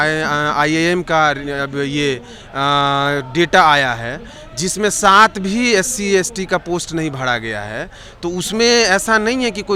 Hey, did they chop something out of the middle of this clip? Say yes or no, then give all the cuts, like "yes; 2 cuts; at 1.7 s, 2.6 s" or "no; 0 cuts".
no; 0 cuts